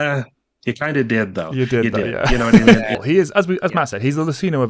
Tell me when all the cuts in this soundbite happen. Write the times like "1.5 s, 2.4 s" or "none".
3.0 s